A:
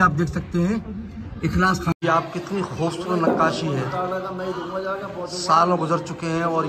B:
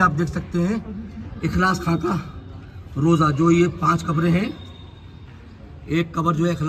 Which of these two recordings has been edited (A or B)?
A